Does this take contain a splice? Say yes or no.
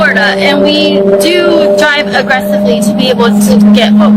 no